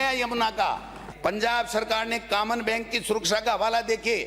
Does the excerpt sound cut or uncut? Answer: cut